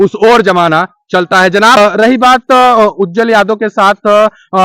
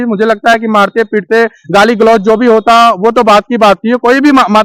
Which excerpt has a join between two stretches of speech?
first; 1 cut; at 1.8 s

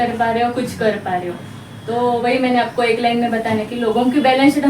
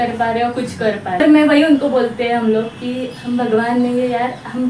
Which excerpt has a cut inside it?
second; 1 cut; at 1.2 s

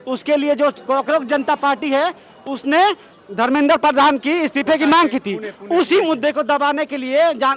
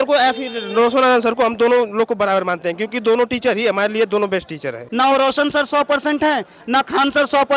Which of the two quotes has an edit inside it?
second; 1 cut; at 4.8 s

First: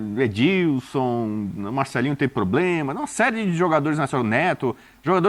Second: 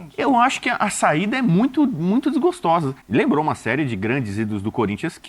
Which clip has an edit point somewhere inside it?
second; 1 cut; at 3.0 s

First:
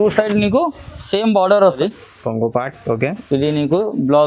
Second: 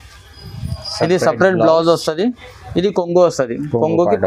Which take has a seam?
first; 1 cut; at 1.8 s

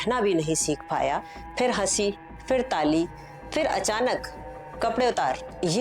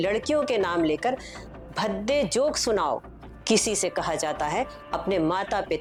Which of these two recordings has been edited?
first; 1 cut; at 1.4 s

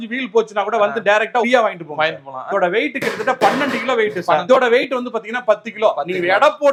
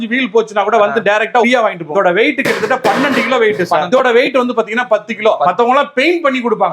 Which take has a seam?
second; 2 cuts; at 1.8 s, 5.5 s

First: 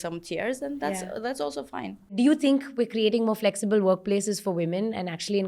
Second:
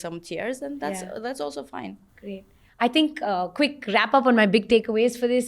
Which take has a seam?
first; 1 cut; at 2.1 s

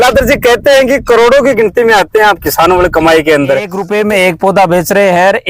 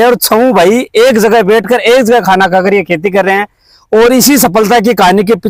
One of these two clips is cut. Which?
first; 1 cut; at 3.8 s

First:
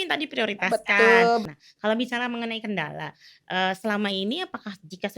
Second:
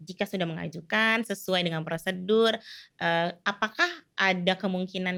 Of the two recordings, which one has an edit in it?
first; 1 cut; at 1.5 s

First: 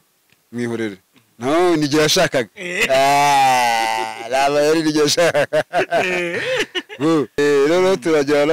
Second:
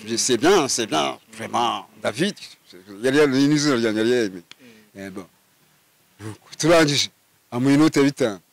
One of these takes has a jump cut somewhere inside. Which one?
first; 1 cut; at 7.4 s

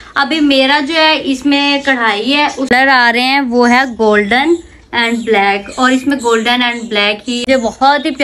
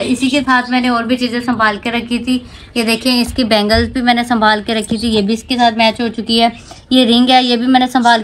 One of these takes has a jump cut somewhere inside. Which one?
first; 2 cuts; at 2.7 s, 7.5 s

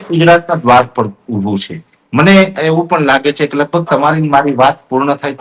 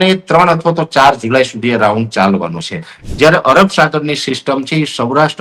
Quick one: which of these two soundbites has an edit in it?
second; 1 cut; at 3.0 s

